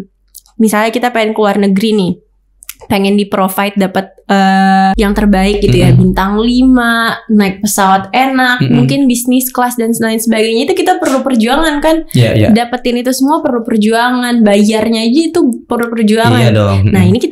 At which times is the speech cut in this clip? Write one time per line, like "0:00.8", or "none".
0:05.0

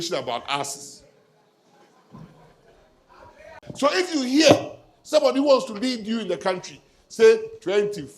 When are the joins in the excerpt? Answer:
0:03.6

